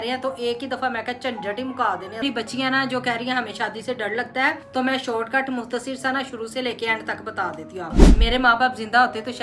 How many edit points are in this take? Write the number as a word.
three